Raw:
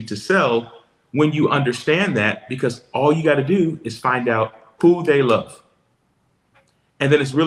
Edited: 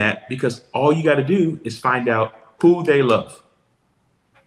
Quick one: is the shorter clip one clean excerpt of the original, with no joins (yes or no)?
yes